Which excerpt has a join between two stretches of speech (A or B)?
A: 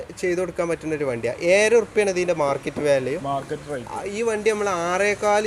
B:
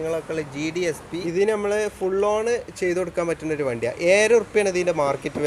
B